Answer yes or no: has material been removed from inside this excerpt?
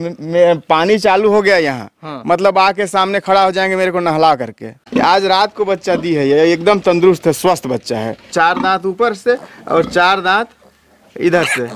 yes